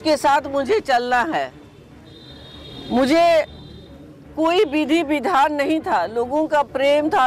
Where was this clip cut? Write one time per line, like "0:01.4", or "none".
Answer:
none